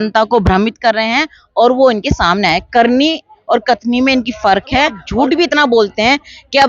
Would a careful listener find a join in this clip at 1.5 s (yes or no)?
no